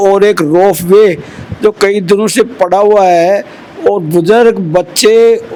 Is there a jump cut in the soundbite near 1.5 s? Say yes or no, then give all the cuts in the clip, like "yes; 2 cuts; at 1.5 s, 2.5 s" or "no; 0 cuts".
no; 0 cuts